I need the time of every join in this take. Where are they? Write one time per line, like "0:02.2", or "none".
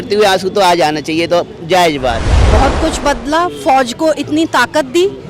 0:02.3